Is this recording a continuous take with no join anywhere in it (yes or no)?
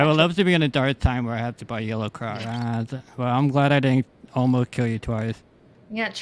no